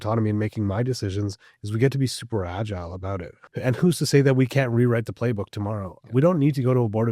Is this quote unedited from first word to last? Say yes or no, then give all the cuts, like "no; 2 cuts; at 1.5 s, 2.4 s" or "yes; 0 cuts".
no; 1 cut; at 3.4 s